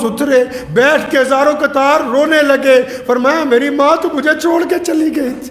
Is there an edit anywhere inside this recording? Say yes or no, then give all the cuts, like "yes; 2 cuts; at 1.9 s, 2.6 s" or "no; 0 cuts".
no; 0 cuts